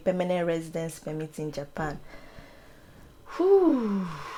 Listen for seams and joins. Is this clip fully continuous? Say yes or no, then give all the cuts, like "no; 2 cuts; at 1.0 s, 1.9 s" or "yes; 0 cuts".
yes; 0 cuts